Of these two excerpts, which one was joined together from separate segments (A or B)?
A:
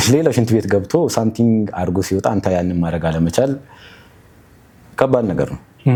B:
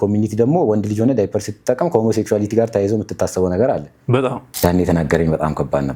B